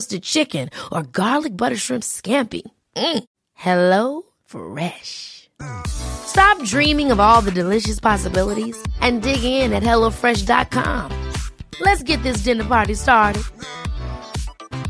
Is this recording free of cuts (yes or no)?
yes